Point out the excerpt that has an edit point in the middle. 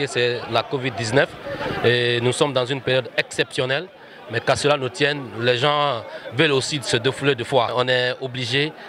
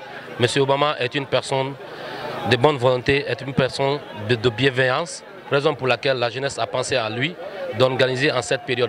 first; 1 cut; at 7.7 s

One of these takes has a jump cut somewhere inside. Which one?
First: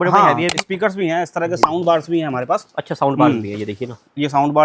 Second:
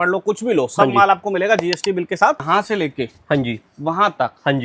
second; 1 cut; at 2.4 s

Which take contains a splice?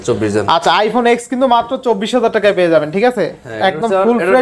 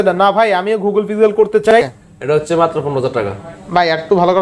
second; 1 cut; at 1.7 s

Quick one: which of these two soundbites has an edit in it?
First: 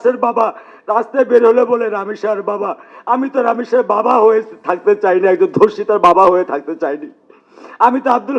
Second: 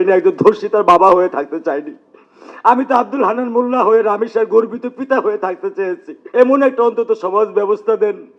second; 1 cut; at 6.1 s

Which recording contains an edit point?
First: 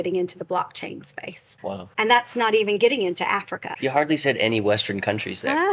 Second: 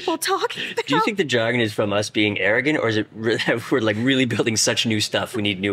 first; 2 cuts; at 1.8 s, 3.7 s

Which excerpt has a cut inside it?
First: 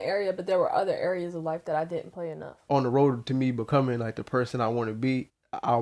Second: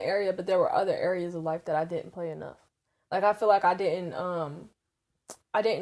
first; 1 cut; at 2.6 s

